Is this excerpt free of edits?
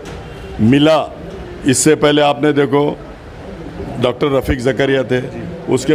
yes; 0 cuts

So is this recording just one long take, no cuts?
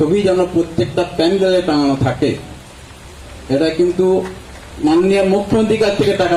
yes; 0 cuts

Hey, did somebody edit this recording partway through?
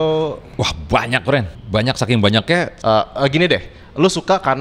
yes; 2 cuts; at 1.6 s, 2.7 s

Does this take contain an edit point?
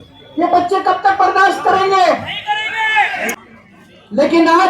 yes; 1 cut; at 3.3 s

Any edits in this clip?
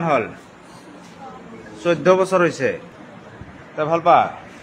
yes; 1 cut; at 2.9 s

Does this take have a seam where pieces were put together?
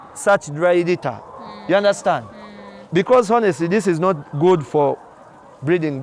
no; 0 cuts

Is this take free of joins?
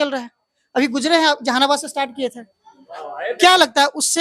yes; 0 cuts

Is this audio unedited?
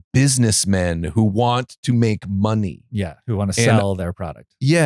yes; 0 cuts

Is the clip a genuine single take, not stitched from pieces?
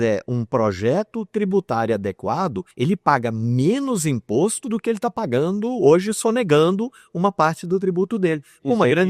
yes; 0 cuts

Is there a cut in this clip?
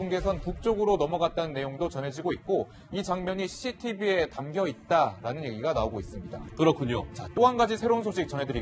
yes; 1 cut; at 2.7 s

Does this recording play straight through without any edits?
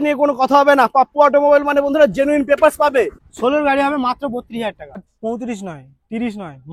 no; 2 cuts; at 3.2 s, 5.0 s

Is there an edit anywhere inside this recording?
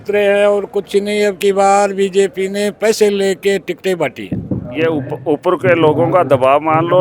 yes; 1 cut; at 4.7 s

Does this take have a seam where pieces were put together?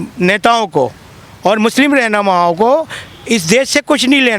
no; 0 cuts

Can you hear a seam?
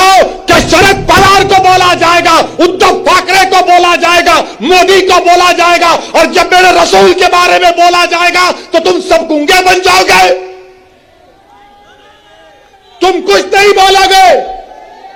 no; 0 cuts

